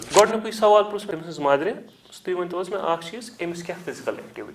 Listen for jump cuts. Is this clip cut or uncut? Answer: cut